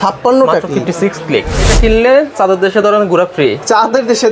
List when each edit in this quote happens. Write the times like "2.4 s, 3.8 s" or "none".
1.7 s